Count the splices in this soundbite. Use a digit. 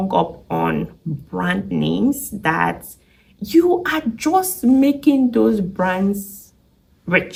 0